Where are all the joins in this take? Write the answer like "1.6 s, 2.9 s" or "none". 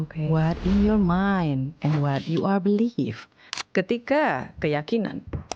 3.6 s